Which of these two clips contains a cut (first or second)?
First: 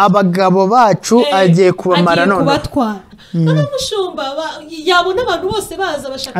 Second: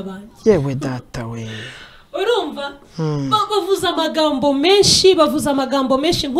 first